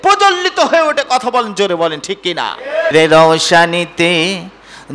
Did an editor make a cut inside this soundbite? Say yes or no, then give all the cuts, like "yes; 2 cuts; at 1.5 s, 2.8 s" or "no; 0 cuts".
yes; 1 cut; at 2.9 s